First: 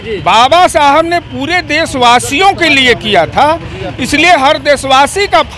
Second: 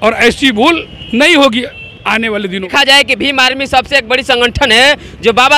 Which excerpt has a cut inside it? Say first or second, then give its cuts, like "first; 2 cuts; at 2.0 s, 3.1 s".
second; 1 cut; at 2.7 s